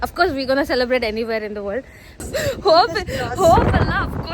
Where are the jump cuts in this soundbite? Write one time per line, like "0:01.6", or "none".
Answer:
0:02.2